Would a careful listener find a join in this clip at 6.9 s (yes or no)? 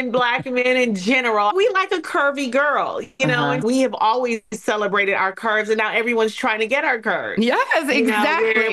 no